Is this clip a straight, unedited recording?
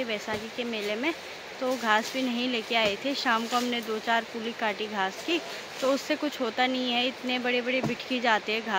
yes; 0 cuts

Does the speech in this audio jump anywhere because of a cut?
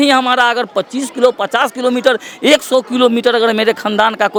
no; 0 cuts

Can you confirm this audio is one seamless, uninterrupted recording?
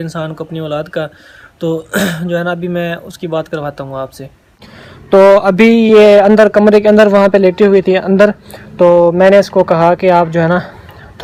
yes; 0 cuts

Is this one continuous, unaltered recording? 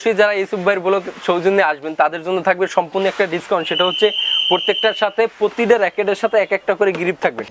yes; 0 cuts

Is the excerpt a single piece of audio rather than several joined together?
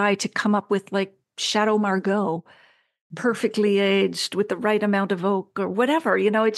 yes; 0 cuts

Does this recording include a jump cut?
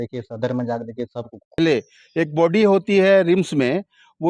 yes; 1 cut; at 1.6 s

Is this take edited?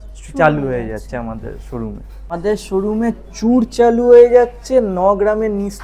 yes; 1 cut; at 2.3 s

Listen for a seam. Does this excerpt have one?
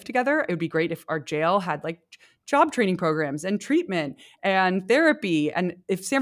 no; 0 cuts

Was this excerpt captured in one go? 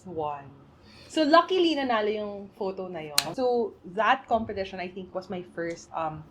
no; 1 cut; at 3.2 s

